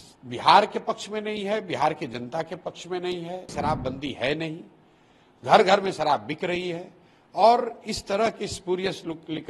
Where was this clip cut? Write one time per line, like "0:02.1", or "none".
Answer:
0:03.5